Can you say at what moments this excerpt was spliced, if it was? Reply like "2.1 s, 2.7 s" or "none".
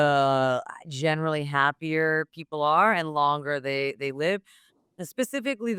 none